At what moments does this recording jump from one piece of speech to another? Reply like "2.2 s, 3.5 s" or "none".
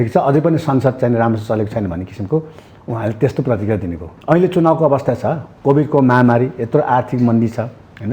4.1 s